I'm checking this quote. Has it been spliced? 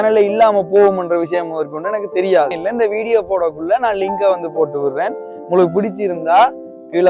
yes; 1 cut; at 2.6 s

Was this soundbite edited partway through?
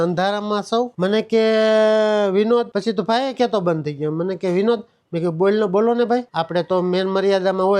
yes; 1 cut; at 0.9 s

